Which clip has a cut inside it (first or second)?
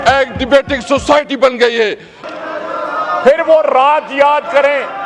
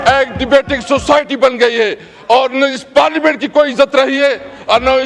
first